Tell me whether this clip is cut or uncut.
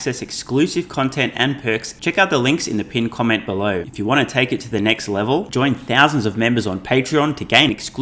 cut